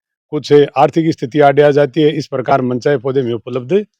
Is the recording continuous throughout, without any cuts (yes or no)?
yes